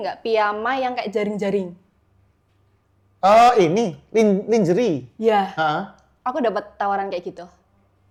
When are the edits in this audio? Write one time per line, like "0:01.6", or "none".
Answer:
none